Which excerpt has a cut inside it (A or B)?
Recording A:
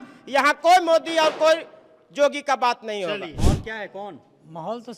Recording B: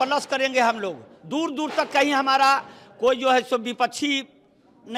A